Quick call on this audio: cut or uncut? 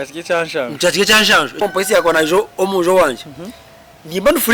cut